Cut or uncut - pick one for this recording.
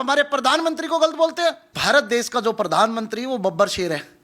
cut